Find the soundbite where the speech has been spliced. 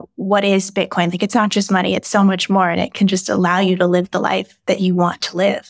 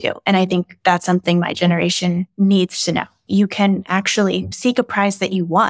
second; 2 cuts; at 3.2 s, 4.5 s

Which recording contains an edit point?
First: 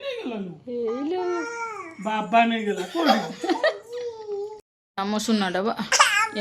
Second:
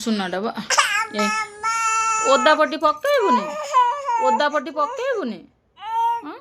first; 1 cut; at 4.3 s

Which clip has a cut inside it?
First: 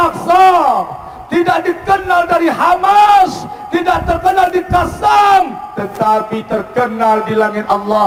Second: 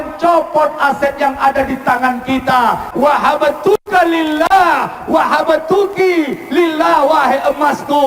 second; 1 cut; at 2.9 s

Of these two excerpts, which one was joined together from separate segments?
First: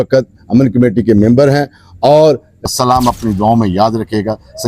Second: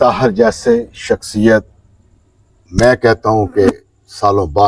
first; 1 cut; at 2.5 s

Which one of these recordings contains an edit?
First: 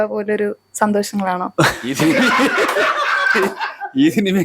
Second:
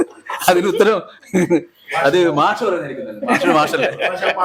first; 1 cut; at 1.9 s

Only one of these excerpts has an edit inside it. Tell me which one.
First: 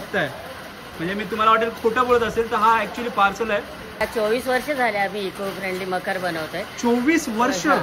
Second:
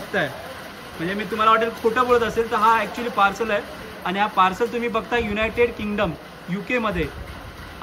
first; 1 cut; at 4.0 s

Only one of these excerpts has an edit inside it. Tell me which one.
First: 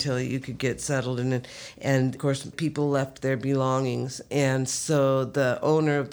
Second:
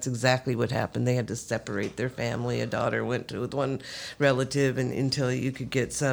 first; 1 cut; at 2.2 s

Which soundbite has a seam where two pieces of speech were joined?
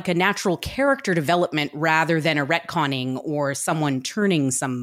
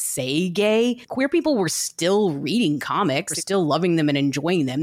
second; 2 cuts; at 1.1 s, 3.4 s

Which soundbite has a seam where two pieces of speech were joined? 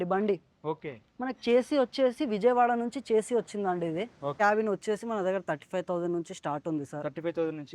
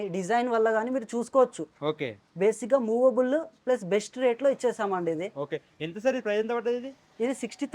first; 1 cut; at 4.4 s

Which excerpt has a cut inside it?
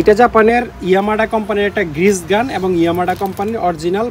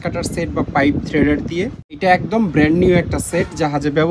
second; 1 cut; at 1.8 s

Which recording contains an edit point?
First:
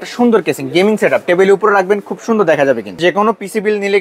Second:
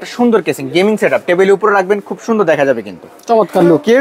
first; 1 cut; at 3.0 s

